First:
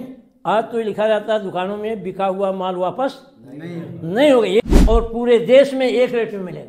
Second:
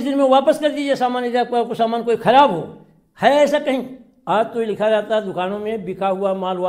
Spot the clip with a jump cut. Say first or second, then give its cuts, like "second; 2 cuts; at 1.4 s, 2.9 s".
first; 1 cut; at 4.7 s